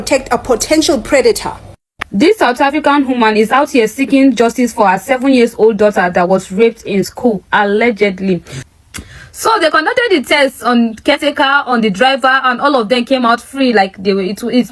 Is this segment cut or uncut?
cut